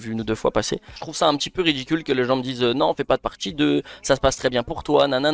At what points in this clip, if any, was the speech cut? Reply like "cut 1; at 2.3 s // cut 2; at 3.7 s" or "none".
cut 1; at 1.0 s